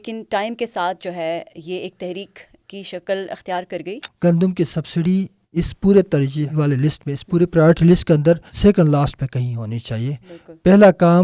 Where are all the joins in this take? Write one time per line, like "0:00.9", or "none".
0:04.1
0:05.4
0:06.5
0:08.5